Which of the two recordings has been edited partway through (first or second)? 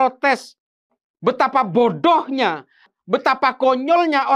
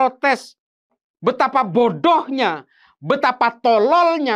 first